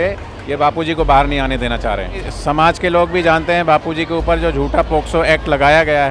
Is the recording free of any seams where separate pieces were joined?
no; 1 cut; at 2.3 s

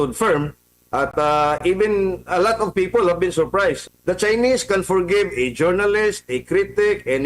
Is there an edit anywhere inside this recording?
yes; 1 cut; at 3.8 s

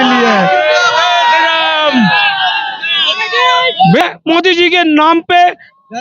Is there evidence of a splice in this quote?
yes; 1 cut; at 4.0 s

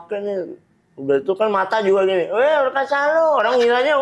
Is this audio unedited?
yes; 0 cuts

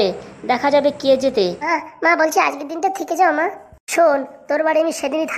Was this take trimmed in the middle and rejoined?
yes; 1 cut; at 1.7 s

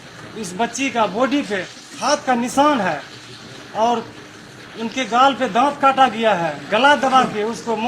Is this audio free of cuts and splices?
yes; 0 cuts

